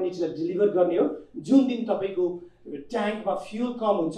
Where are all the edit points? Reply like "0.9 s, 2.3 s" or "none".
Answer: none